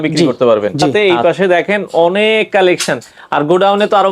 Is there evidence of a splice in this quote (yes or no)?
yes